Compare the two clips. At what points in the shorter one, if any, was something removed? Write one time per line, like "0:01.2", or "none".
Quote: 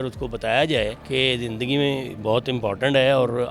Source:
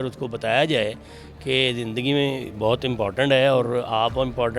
0:01.0